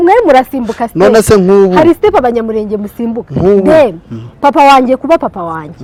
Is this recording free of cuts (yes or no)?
yes